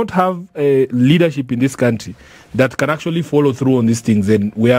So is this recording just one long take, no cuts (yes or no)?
yes